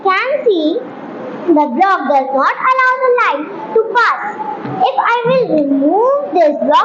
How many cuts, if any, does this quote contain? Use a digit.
0